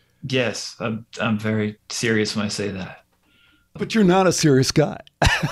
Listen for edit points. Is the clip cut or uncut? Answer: cut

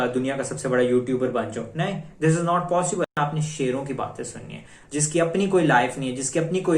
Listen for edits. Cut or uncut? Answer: cut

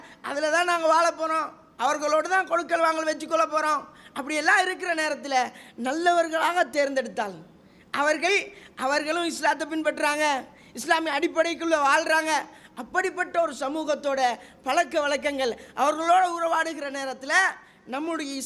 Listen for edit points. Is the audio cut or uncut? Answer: uncut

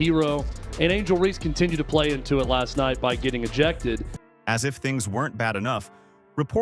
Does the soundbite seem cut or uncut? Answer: uncut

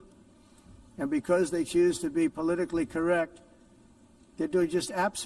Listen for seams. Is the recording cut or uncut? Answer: uncut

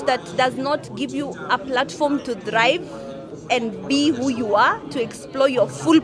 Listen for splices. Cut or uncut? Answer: uncut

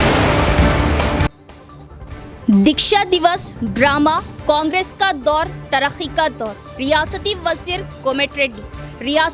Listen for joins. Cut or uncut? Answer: cut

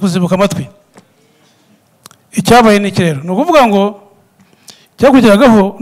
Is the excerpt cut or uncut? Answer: cut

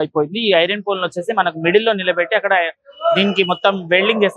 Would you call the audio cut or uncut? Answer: uncut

